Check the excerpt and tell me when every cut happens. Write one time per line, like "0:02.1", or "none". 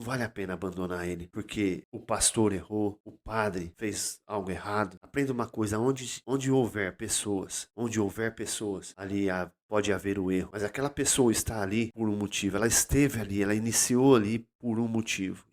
0:01.3
0:01.9
0:03.4
0:05.0
0:06.1
0:07.6
0:08.9
0:10.5
0:11.9